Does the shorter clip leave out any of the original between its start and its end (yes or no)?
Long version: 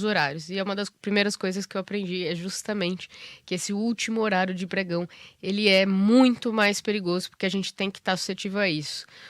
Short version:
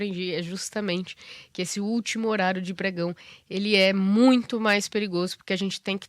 no